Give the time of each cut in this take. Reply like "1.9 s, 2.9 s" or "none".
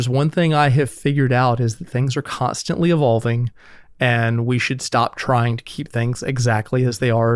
none